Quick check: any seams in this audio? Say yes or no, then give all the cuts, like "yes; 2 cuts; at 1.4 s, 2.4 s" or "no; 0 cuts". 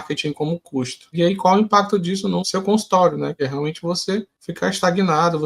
yes; 4 cuts; at 1.1 s, 2.4 s, 3.4 s, 4.4 s